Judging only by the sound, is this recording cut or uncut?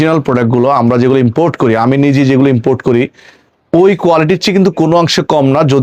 uncut